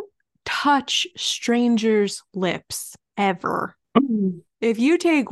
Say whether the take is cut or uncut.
cut